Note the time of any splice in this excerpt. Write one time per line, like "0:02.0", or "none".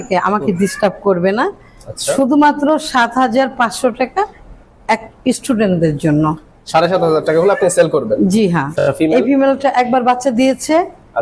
0:08.8